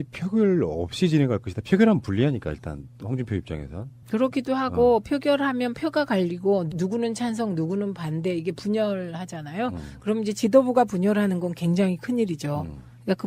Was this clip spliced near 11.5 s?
yes; 1 cut; at 11.5 s

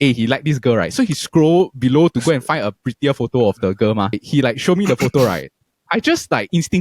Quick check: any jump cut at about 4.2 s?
yes; 1 cut; at 4.2 s

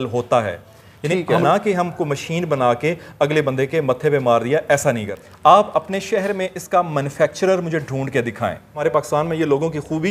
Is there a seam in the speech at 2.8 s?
no; 3 cuts; at 1.4 s, 5.2 s, 8.8 s

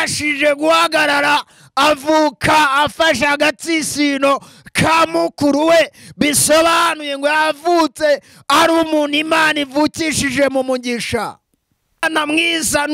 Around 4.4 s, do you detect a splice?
no; 1 cut; at 12.0 s

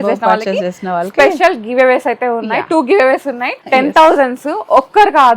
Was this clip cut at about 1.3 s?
no; 1 cut; at 3.6 s

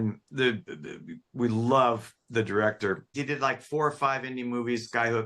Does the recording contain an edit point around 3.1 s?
yes; 1 cut; at 3.1 s

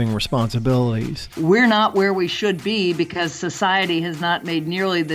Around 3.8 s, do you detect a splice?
no; 1 cut; at 1.2 s

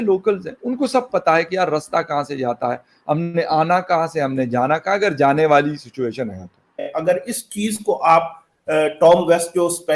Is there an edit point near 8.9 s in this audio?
no; 1 cut; at 7.1 s

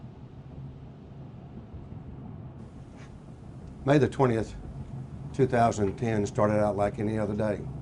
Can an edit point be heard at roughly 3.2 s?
yes; 1 cut; at 3.2 s

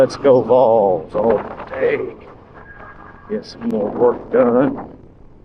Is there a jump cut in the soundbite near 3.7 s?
no; 0 cuts

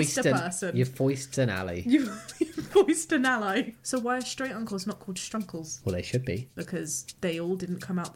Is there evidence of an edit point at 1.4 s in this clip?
no; 3 cuts; at 3.8 s, 5.7 s, 6.7 s

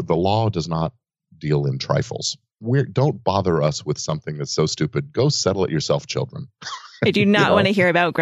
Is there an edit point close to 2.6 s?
yes; 1 cut; at 2.6 s

